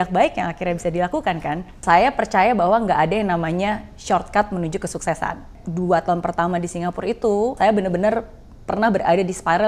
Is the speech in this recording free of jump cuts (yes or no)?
no